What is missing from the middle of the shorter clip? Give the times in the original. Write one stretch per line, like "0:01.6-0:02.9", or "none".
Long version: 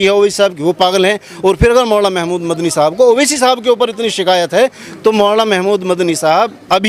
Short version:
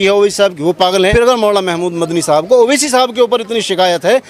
0:01.1-0:01.6